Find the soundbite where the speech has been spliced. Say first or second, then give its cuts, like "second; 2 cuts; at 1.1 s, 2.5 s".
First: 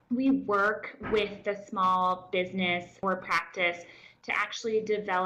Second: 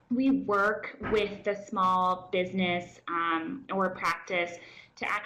first; 1 cut; at 3.0 s